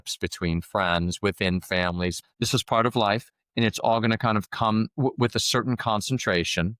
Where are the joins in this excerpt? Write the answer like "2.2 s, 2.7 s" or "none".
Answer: 2.3 s